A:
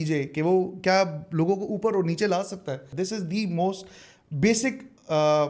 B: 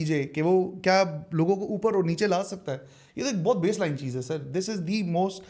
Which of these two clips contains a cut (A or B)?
A